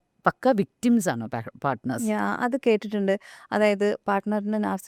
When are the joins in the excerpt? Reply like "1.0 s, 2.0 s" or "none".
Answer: none